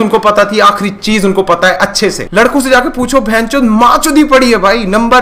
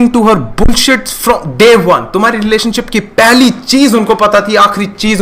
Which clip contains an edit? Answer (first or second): first